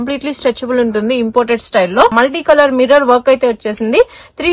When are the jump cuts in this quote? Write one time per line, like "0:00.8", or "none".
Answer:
0:02.1